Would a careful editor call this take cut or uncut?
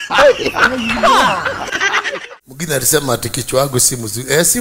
cut